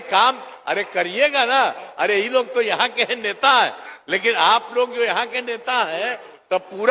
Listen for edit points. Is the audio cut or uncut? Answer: uncut